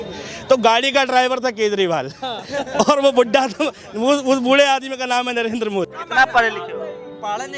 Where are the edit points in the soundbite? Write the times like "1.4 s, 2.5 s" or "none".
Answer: 5.9 s